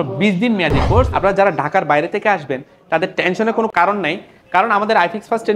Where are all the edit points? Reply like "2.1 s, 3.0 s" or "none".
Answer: 1.1 s